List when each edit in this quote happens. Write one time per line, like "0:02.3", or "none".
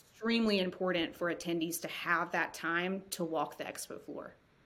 none